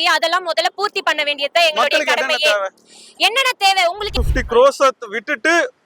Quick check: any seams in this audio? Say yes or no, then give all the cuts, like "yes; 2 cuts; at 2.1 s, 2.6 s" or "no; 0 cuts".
yes; 1 cut; at 4.0 s